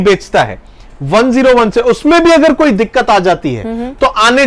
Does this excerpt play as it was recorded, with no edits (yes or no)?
yes